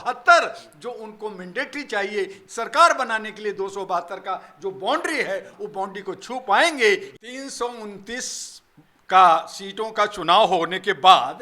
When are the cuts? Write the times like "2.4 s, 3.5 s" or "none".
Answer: 2.4 s, 5.5 s, 7.1 s

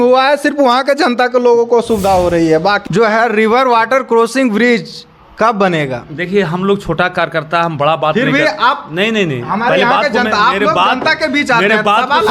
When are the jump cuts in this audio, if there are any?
2.8 s

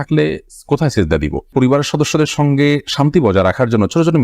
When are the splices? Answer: 1.5 s

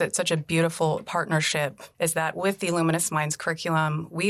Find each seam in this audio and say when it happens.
1.8 s

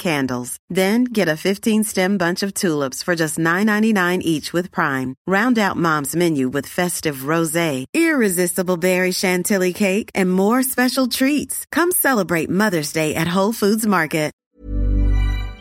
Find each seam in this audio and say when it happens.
14.5 s

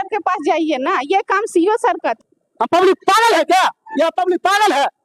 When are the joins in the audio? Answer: 2.2 s

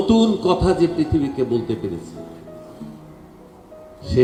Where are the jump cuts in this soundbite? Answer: none

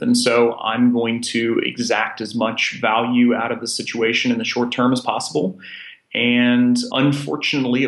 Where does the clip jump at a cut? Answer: 6.9 s

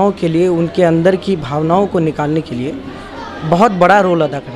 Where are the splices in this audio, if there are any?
none

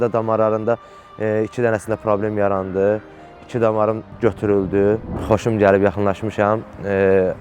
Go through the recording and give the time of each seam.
5.1 s

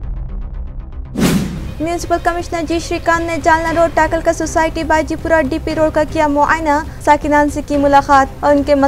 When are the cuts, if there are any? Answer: 1.2 s

